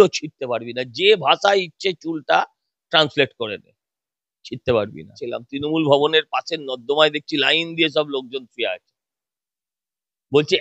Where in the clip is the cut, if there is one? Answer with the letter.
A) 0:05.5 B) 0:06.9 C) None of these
A